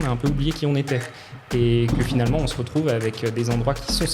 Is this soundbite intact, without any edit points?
no; 1 cut; at 1.2 s

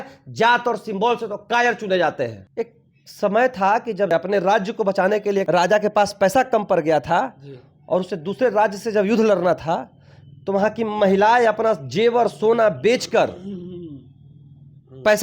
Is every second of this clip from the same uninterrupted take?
no; 3 cuts; at 2.4 s, 4.1 s, 5.5 s

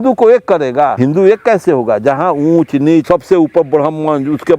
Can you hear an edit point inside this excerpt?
yes; 2 cuts; at 0.9 s, 3.0 s

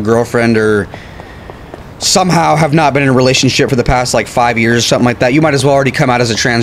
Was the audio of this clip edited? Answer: no; 0 cuts

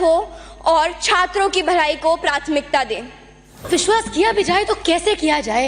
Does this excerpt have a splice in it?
yes; 1 cut; at 3.7 s

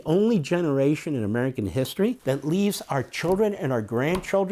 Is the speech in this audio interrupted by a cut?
yes; 1 cut; at 2.2 s

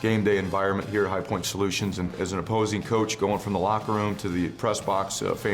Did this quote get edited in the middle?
yes; 1 cut; at 2.1 s

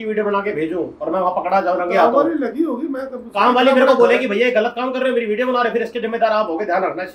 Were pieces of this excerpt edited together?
no; 0 cuts

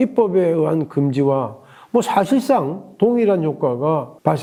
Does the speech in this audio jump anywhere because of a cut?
no; 0 cuts

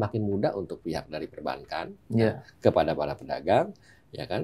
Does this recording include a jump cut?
no; 0 cuts

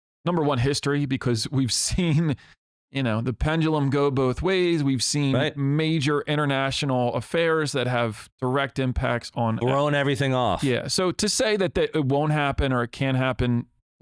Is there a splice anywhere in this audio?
no; 0 cuts

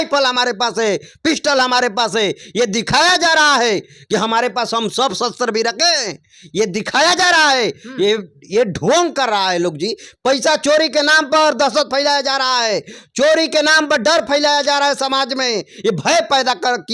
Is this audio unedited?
yes; 0 cuts

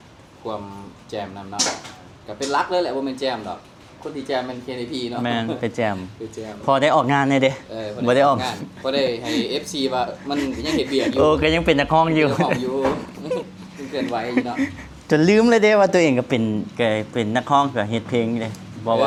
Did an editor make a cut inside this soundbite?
no; 0 cuts

